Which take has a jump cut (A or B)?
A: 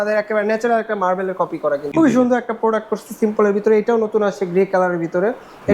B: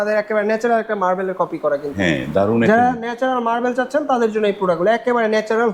A